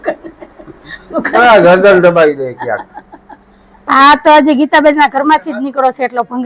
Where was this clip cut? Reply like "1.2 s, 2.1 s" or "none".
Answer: 3.9 s